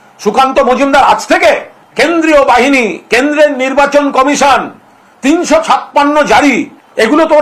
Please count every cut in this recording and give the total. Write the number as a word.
zero